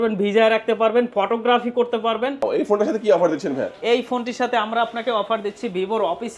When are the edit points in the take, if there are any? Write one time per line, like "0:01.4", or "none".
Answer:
0:02.4